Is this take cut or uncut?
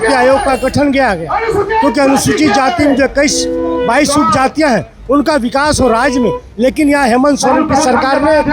uncut